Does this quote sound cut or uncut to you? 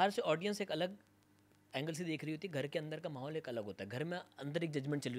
uncut